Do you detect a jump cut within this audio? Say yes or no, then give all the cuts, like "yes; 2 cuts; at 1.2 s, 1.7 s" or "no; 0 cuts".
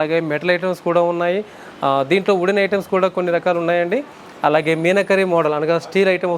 no; 0 cuts